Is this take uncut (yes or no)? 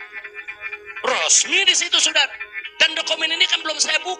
yes